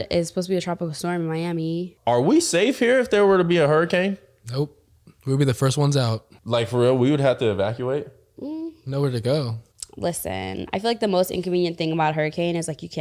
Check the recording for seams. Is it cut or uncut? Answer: cut